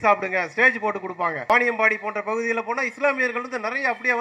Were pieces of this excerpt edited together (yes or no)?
yes